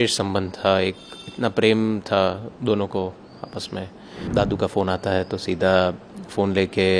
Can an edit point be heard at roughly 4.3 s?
yes; 1 cut; at 4.3 s

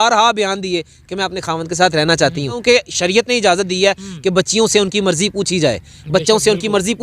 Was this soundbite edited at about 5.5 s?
no; 1 cut; at 2.6 s

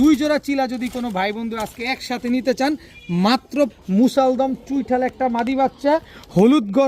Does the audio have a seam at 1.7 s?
no; 1 cut; at 3.7 s

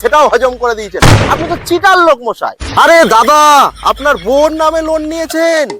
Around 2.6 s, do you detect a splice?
yes; 1 cut; at 2.6 s

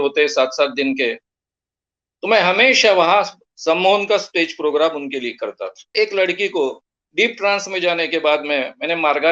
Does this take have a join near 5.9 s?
yes; 1 cut; at 5.9 s

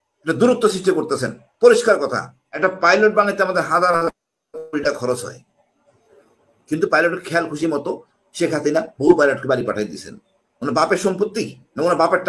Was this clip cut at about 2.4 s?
yes; 1 cut; at 2.4 s

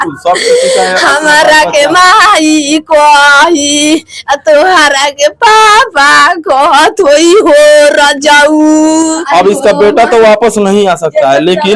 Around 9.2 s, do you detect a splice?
yes; 1 cut; at 9.2 s

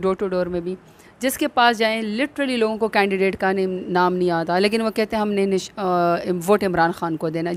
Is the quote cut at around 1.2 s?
no; 0 cuts

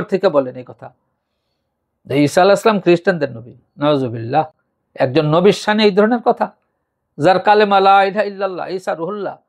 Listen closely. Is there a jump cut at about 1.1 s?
no; 0 cuts

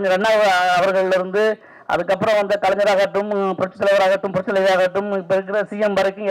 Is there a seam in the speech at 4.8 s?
no; 0 cuts

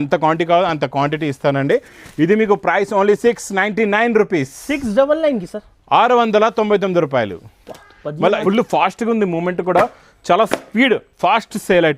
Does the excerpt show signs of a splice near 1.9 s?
no; 1 cut; at 8.4 s

